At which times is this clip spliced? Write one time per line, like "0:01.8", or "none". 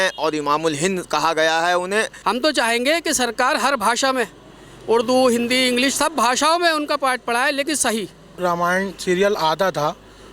0:02.1
0:08.3